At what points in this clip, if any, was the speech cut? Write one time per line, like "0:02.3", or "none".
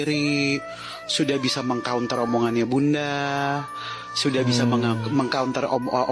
none